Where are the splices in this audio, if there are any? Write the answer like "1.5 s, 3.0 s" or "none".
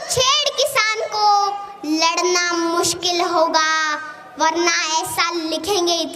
none